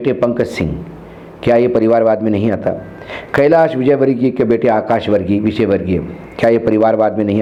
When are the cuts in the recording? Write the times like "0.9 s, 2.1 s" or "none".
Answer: none